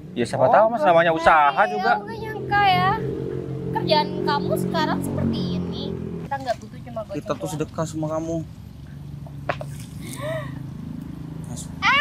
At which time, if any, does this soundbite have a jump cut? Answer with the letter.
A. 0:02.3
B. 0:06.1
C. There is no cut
B